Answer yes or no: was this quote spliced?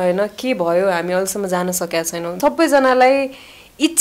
yes